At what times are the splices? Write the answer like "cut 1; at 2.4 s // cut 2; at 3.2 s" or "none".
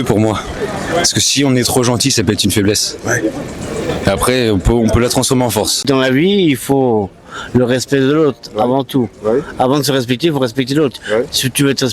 cut 1; at 5.8 s